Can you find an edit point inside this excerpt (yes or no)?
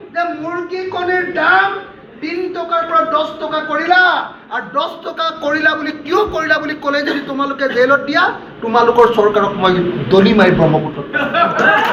no